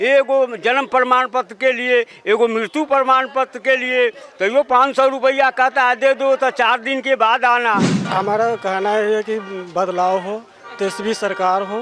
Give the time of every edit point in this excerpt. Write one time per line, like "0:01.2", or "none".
0:08.0